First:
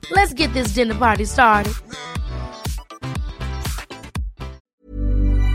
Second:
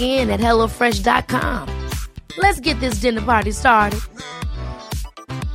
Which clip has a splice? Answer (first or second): first